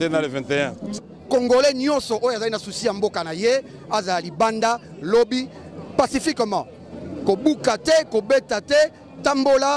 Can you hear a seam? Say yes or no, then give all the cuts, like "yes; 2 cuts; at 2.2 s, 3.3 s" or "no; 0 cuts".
yes; 1 cut; at 1.0 s